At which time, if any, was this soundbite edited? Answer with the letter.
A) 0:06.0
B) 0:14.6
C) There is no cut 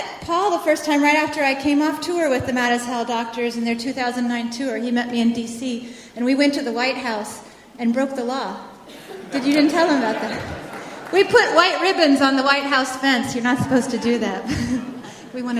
B